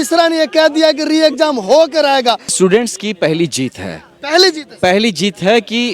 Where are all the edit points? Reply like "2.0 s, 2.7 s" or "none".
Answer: 2.5 s